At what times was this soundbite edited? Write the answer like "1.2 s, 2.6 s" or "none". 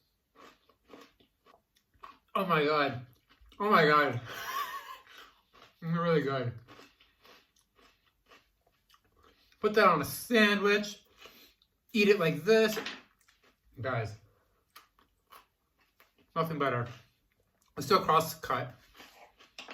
1.5 s